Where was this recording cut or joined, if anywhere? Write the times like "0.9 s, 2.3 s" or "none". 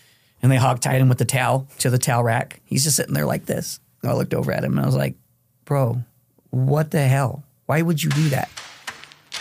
4.0 s